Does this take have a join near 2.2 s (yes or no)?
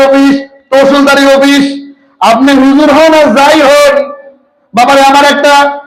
no